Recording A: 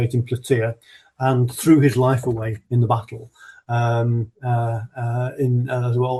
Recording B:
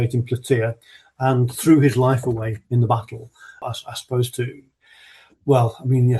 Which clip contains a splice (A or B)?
B